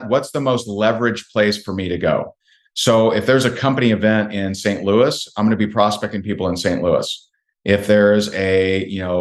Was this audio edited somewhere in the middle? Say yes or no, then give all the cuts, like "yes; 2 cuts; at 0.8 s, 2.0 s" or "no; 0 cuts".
no; 0 cuts